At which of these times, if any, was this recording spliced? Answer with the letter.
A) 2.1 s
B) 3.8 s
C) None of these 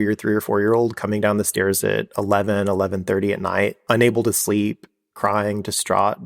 B